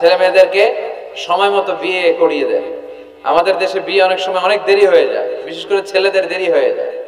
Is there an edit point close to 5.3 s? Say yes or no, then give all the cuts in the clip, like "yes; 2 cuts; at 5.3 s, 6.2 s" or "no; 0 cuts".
no; 0 cuts